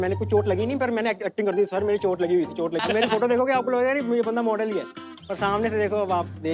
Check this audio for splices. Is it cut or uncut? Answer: cut